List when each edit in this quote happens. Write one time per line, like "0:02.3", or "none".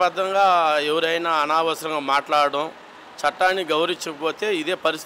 none